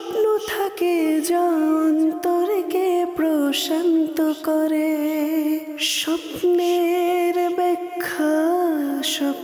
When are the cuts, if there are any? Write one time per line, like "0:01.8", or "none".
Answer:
none